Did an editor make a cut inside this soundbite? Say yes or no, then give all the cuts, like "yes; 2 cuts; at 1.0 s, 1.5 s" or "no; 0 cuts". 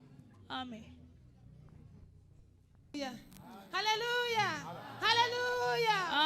yes; 1 cut; at 2.9 s